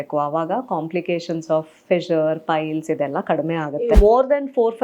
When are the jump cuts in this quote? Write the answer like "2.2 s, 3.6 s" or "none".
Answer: 3.8 s